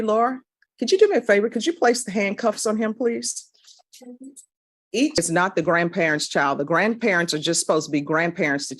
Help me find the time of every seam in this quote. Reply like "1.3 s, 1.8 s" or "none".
5.2 s